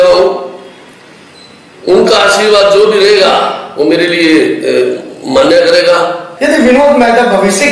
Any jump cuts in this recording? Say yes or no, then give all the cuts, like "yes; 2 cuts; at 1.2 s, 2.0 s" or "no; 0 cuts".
yes; 1 cut; at 6.3 s